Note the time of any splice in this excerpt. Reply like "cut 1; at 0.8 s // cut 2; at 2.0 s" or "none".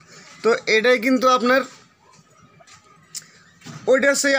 none

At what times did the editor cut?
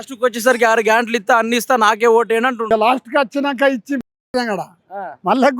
cut 1; at 2.7 s

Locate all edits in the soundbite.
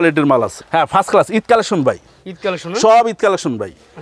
none

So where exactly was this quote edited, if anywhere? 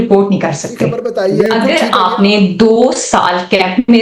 cut 1; at 1.4 s

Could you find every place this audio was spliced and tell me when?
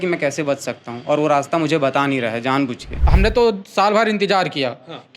cut 1; at 3.0 s

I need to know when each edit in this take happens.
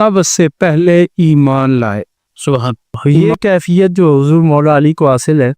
cut 1; at 3.0 s

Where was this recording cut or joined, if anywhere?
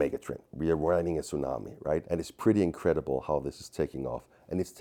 cut 1; at 2.1 s

